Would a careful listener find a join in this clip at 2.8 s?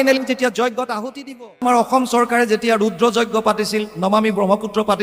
no; 1 cut; at 1.5 s

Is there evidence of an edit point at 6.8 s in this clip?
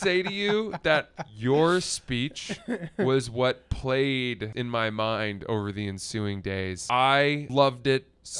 yes; 3 cuts; at 4.5 s, 6.8 s, 7.4 s

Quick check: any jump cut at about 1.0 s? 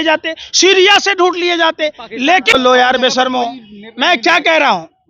no; 1 cut; at 2.5 s

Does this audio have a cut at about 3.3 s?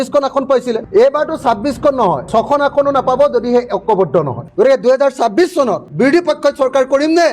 no; 3 cuts; at 0.8 s, 4.5 s, 5.9 s

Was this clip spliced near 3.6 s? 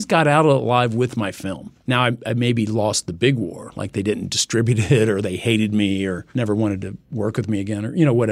no; 2 cuts; at 1.7 s, 6.2 s

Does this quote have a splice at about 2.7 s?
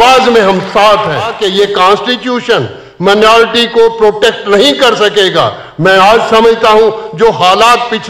no; 1 cut; at 1.4 s

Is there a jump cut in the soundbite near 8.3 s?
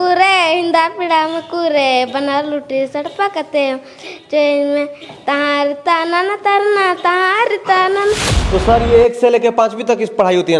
yes; 1 cut; at 8.3 s

